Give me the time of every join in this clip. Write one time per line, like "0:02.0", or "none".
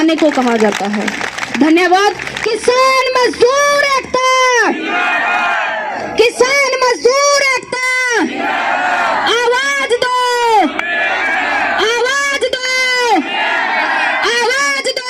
none